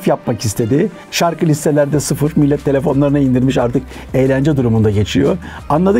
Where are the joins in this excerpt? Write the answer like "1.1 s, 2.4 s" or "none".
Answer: 1.1 s